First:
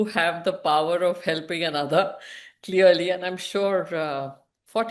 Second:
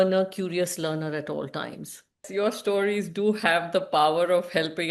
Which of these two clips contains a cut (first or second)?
second